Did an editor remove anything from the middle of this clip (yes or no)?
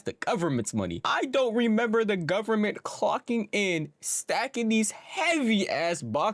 no